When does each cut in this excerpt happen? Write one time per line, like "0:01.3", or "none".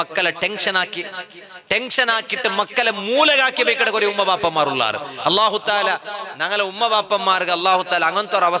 none